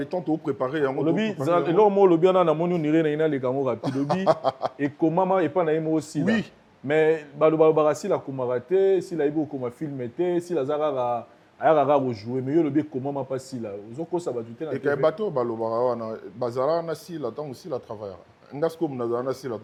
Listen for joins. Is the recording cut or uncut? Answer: uncut